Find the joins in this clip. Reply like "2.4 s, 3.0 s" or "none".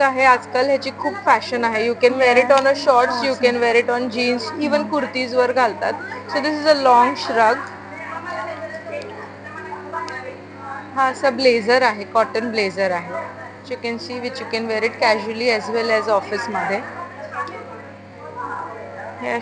none